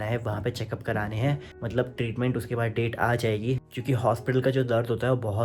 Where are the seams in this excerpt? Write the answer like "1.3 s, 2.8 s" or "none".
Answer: 1.5 s, 3.6 s